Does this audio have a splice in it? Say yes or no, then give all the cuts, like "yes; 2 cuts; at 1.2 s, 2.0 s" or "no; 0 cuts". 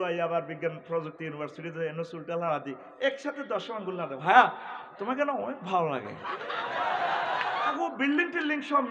yes; 1 cut; at 7.7 s